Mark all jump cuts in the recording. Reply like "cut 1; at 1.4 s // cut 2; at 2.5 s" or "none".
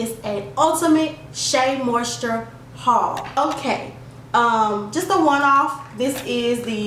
cut 1; at 3.4 s